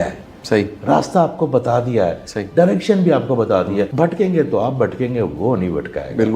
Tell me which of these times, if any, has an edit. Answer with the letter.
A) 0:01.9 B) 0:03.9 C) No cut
B